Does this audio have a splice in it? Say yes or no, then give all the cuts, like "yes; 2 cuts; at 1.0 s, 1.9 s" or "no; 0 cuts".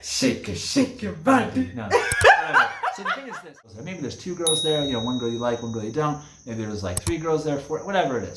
yes; 1 cut; at 3.8 s